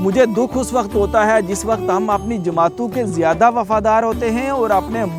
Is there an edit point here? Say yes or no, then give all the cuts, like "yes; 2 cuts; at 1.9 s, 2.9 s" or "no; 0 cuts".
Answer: no; 0 cuts